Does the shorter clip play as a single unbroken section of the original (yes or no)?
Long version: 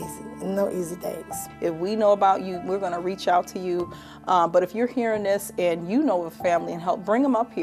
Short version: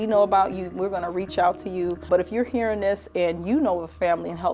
no